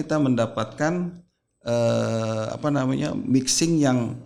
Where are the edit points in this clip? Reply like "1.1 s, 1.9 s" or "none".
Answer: none